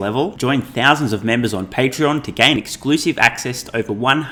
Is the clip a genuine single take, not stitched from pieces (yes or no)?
yes